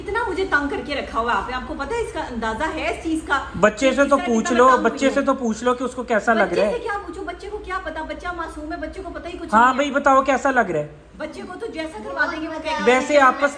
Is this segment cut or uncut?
uncut